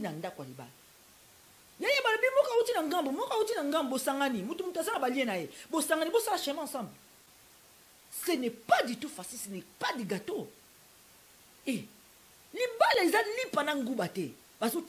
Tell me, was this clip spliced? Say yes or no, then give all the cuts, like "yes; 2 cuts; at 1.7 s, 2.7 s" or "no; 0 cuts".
no; 0 cuts